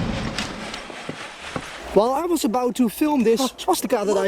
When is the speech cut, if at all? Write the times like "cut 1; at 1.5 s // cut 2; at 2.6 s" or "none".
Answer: cut 1; at 1.8 s